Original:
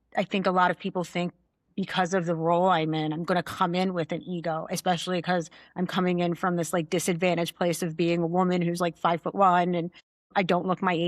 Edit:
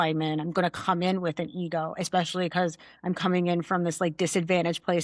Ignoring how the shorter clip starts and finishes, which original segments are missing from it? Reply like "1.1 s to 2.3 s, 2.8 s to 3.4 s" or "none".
none